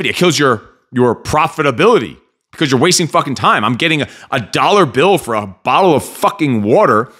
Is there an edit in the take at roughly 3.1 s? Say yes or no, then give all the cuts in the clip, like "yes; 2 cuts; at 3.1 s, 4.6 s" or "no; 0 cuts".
no; 0 cuts